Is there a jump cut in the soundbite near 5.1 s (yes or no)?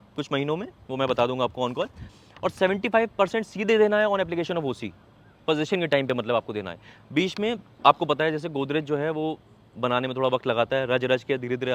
no